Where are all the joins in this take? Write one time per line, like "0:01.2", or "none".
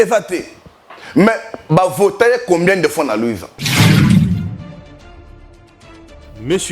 0:03.5